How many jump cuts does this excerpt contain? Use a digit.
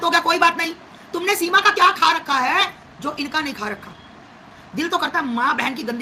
0